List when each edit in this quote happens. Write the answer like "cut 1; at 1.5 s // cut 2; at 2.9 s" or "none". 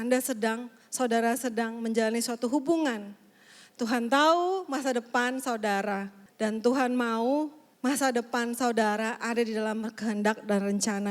cut 1; at 6.2 s // cut 2; at 7.6 s